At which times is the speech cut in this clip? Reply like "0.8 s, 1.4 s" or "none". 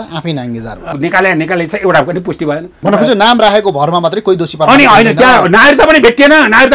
0.9 s, 2.8 s